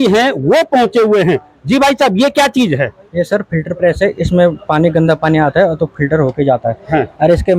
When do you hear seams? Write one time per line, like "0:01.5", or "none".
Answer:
none